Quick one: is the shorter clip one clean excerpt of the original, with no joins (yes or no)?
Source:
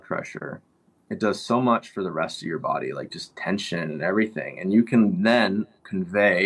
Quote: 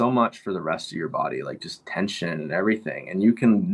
yes